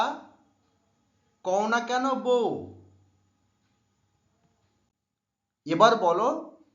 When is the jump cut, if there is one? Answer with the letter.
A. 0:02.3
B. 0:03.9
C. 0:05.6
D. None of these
A